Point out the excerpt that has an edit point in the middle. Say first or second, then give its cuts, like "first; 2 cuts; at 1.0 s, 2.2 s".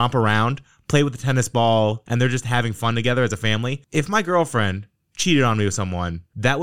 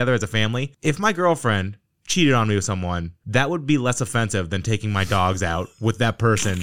first; 1 cut; at 2.0 s